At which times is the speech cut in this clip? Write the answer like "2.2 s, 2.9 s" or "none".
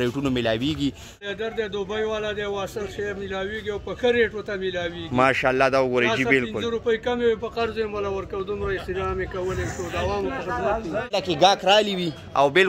1.1 s, 11.1 s